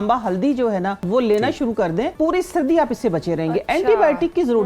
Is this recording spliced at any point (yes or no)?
yes